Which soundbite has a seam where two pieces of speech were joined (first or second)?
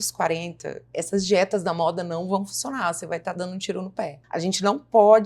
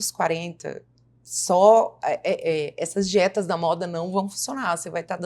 first